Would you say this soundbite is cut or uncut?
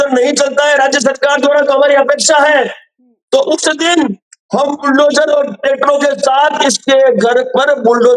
uncut